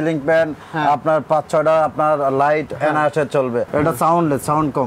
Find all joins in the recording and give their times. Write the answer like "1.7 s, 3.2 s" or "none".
3.7 s